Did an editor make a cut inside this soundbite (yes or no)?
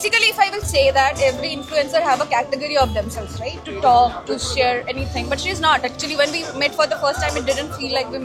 no